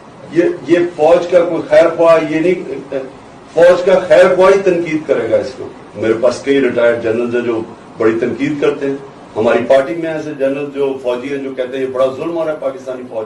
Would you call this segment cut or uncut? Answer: uncut